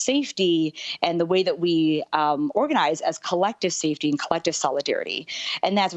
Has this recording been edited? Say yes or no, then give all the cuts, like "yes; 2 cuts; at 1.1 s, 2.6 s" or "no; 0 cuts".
no; 0 cuts